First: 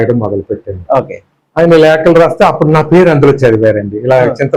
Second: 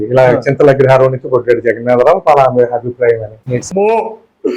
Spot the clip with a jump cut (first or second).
second